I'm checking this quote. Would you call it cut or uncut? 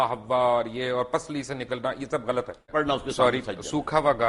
cut